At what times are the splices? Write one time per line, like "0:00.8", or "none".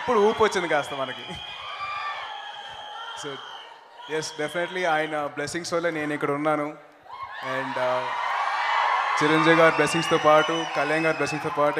0:05.9